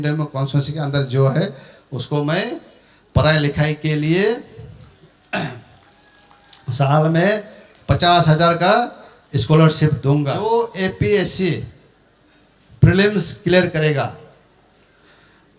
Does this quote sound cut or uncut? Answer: cut